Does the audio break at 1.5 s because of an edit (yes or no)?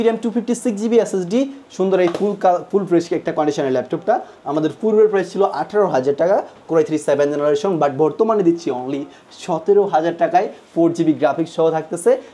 no